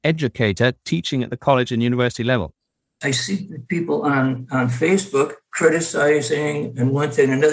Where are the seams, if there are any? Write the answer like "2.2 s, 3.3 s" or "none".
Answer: 2.9 s